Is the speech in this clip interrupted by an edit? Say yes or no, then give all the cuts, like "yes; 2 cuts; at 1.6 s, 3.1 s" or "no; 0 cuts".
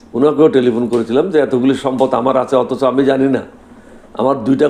no; 0 cuts